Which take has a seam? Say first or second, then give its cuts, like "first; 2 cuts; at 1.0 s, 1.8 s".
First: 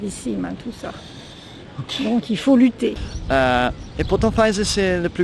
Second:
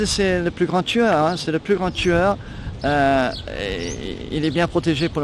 first; 1 cut; at 3.1 s